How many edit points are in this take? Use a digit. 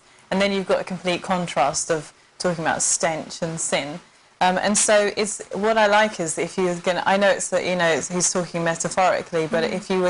1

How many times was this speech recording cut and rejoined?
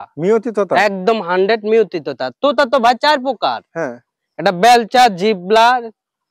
0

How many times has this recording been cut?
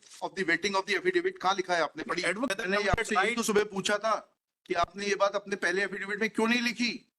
1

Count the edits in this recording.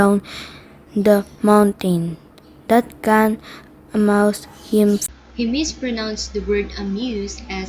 0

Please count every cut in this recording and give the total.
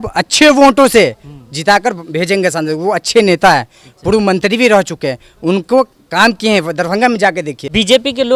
0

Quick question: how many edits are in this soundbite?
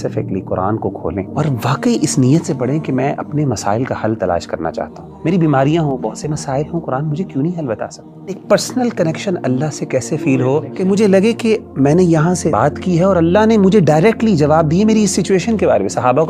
5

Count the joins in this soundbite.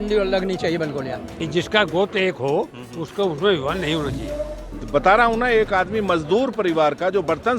2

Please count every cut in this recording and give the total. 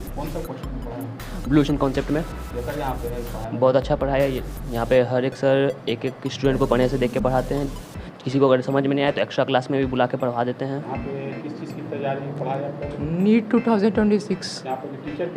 1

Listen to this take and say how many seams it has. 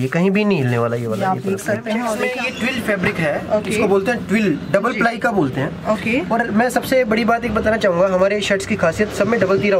1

